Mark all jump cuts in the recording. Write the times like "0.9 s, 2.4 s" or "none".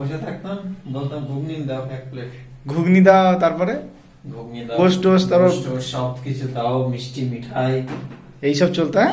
4.8 s